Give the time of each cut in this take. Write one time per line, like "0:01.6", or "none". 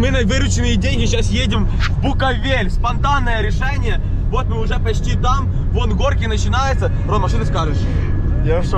none